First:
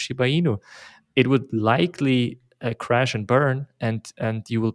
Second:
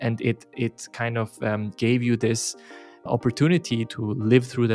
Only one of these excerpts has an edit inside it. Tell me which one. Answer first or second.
second